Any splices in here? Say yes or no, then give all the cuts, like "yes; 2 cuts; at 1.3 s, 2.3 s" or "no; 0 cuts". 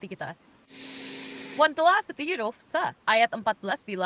yes; 1 cut; at 1.0 s